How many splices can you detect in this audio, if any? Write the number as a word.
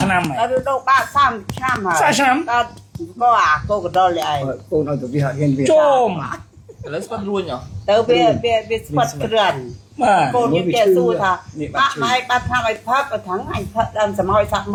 zero